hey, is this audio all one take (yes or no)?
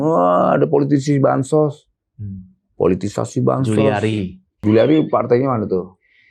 no